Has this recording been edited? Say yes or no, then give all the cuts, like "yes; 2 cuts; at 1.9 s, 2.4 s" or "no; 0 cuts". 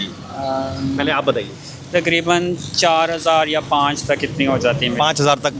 no; 0 cuts